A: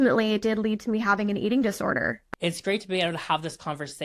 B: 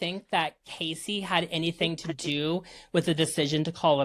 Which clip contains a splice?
A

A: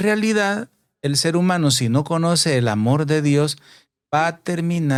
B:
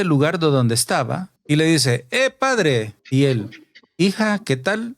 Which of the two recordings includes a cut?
B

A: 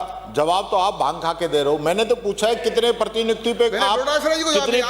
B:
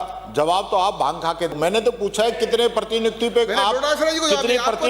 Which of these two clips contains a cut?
B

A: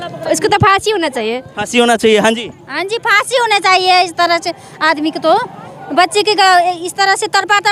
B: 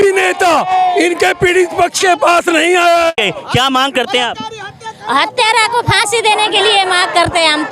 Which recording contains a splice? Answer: B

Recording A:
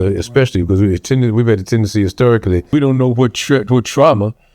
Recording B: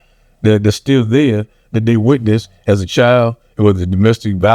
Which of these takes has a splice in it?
A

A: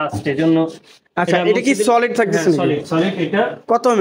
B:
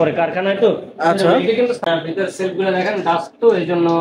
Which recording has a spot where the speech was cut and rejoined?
B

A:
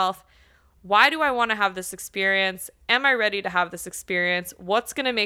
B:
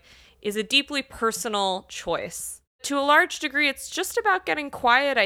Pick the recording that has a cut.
B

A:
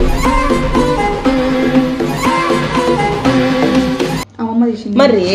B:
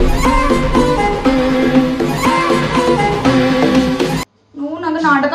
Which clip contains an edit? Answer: A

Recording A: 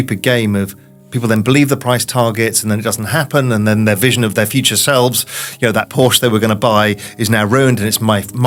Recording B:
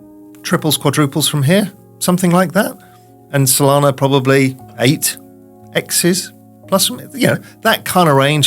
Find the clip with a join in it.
B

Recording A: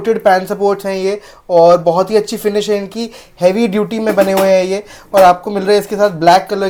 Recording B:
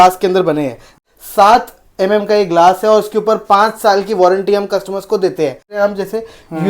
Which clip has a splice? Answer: B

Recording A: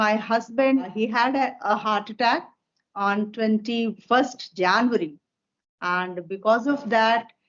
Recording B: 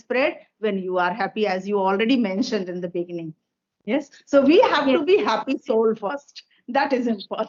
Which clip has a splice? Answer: A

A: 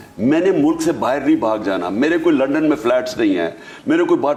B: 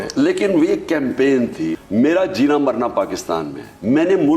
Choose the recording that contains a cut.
B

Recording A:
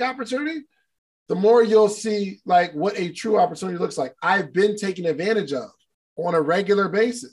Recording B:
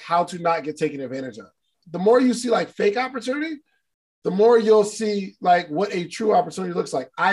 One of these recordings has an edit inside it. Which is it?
B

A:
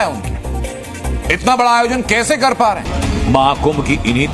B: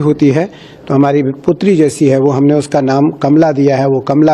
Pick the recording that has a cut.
A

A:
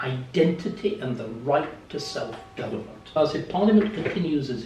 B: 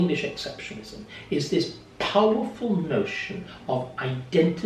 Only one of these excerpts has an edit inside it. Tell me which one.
A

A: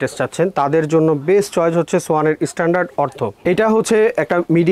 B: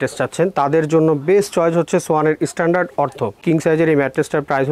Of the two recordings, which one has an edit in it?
B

